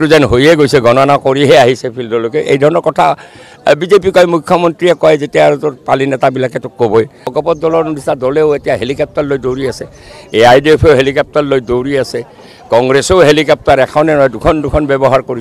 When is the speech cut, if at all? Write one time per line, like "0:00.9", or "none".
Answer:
0:07.3